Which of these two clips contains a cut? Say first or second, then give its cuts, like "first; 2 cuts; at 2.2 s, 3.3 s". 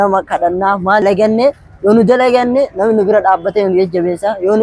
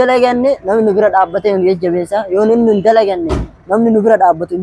first; 1 cut; at 1.0 s